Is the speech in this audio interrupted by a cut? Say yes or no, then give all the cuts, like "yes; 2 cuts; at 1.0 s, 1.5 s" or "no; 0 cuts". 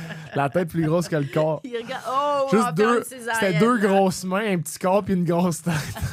no; 0 cuts